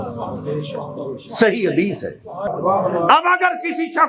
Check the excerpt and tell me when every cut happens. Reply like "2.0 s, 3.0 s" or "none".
2.5 s